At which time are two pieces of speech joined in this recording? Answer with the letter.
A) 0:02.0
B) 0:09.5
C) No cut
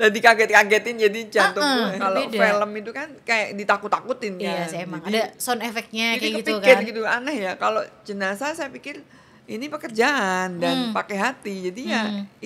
A